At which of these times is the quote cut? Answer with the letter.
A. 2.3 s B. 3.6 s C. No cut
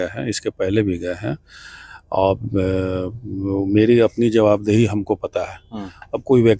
C